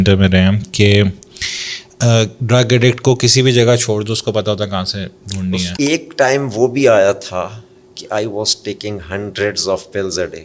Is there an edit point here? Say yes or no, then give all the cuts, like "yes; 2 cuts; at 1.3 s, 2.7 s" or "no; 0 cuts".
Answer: yes; 1 cut; at 5.7 s